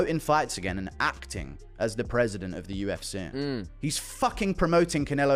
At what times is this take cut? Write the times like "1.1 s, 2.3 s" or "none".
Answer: none